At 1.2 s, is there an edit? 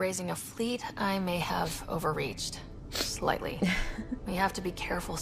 no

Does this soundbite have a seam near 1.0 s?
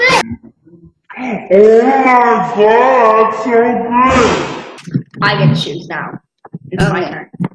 no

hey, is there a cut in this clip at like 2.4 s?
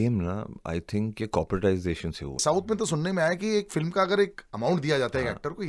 yes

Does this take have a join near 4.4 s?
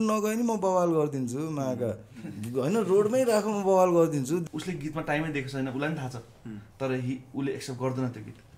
yes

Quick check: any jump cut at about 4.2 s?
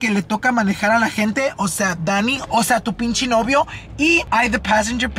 yes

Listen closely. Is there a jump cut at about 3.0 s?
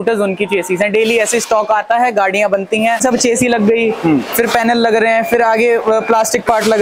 yes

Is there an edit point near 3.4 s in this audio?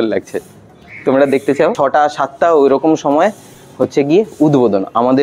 no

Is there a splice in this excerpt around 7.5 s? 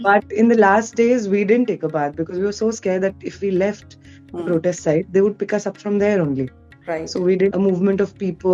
yes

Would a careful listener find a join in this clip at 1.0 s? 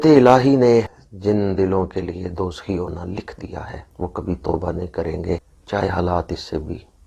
yes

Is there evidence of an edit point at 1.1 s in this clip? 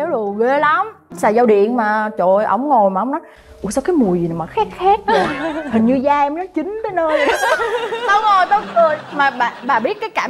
yes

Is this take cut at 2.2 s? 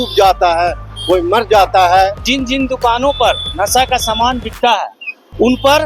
yes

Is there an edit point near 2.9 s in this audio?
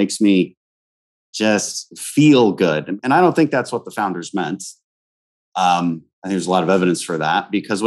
yes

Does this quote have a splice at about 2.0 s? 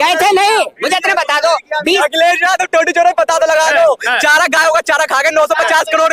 yes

